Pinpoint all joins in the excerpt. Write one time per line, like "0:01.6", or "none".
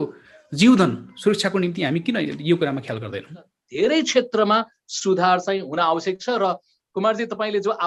0:03.6